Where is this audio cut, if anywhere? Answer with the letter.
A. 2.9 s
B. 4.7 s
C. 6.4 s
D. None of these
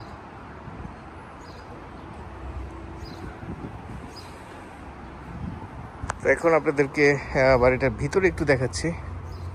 D